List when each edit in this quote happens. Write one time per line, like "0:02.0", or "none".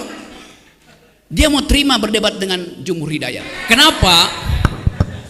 0:03.5